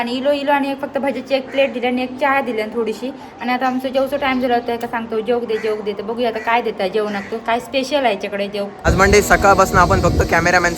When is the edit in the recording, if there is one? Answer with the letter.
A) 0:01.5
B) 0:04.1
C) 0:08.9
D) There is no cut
C